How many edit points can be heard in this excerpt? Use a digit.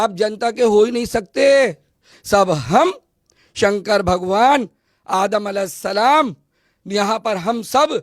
1